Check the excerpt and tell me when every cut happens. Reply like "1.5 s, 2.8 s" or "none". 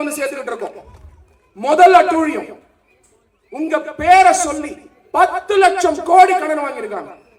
none